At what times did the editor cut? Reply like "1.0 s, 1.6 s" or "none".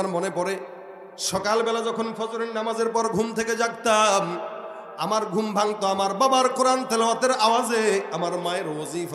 none

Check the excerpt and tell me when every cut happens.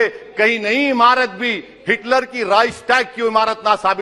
none

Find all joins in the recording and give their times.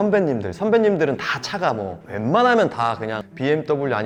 none

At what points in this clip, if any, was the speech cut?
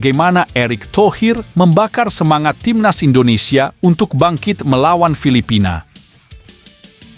none

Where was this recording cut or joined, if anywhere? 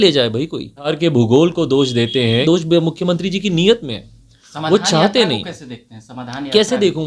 0.9 s, 2.4 s

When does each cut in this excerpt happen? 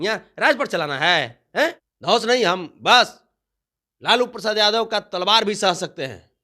1.9 s

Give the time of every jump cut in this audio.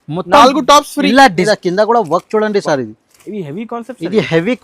1.4 s

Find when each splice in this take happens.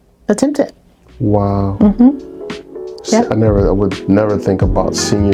none

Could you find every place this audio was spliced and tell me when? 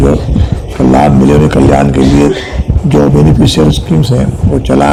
none

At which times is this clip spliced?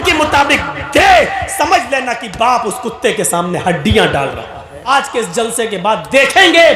4.9 s

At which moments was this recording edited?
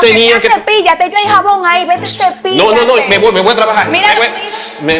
none

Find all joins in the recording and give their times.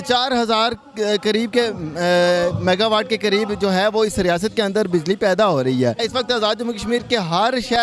6.0 s

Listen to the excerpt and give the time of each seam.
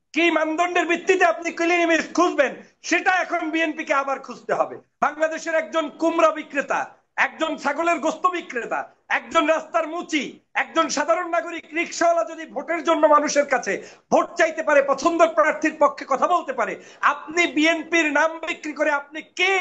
4.8 s

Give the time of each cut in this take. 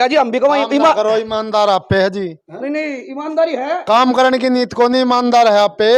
none

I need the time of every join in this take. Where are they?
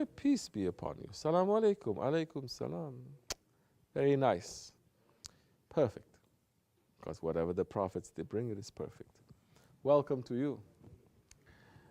7.4 s

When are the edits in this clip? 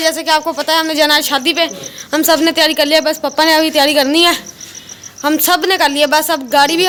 none

